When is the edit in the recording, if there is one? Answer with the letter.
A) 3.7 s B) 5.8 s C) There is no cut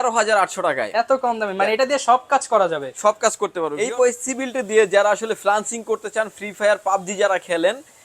A